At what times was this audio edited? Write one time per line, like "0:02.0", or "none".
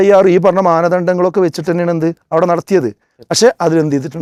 none